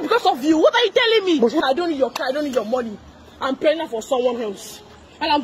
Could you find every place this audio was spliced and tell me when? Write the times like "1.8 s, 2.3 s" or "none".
1.6 s